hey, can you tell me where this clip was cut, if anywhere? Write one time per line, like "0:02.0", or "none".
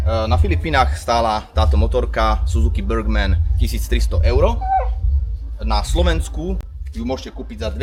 none